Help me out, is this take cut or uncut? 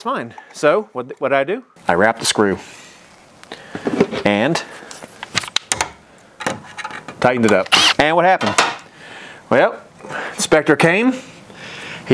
cut